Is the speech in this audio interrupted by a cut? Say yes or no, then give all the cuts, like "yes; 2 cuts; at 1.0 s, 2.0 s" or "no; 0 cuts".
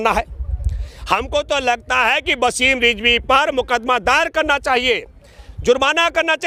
no; 0 cuts